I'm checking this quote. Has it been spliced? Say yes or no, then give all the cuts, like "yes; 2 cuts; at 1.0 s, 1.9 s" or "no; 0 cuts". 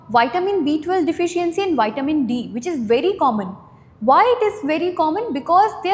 no; 0 cuts